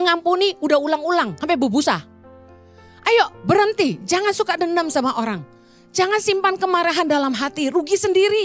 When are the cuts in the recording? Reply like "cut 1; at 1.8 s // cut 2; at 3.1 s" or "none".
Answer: none